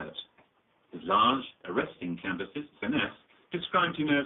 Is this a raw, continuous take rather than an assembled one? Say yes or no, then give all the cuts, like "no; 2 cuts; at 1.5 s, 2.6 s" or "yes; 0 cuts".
yes; 0 cuts